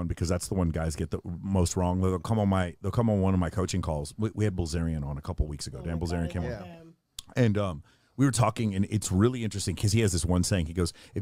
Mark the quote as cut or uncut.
uncut